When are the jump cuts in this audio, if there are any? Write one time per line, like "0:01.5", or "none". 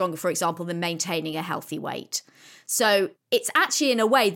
0:03.2